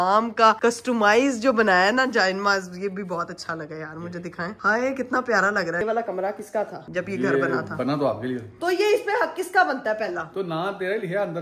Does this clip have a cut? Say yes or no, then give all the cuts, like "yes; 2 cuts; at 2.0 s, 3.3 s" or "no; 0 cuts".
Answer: yes; 3 cuts; at 5.8 s, 6.8 s, 8.5 s